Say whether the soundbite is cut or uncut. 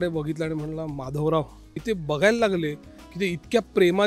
cut